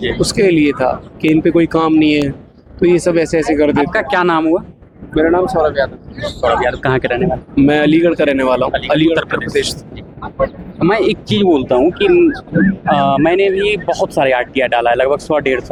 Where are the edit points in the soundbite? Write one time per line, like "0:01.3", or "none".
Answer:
none